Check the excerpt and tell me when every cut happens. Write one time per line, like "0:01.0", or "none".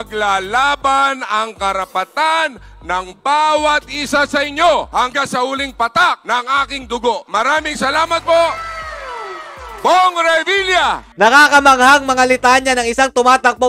none